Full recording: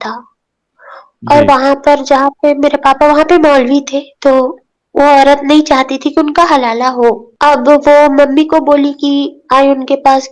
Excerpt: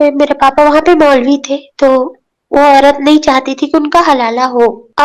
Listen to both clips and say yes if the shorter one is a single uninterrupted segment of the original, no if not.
yes